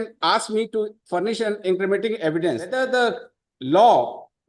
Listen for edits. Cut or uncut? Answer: cut